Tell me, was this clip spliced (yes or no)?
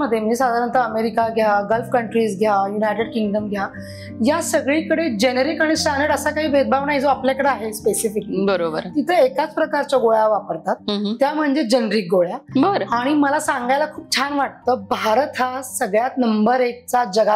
no